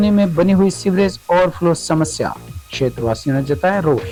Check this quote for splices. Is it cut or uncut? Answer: uncut